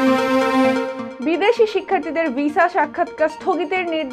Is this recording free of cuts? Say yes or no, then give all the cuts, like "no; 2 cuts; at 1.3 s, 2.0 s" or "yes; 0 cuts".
yes; 0 cuts